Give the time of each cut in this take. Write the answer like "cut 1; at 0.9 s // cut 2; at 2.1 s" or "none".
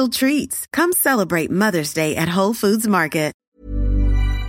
cut 1; at 3.4 s